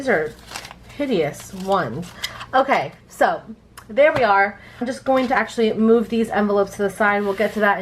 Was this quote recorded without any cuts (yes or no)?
no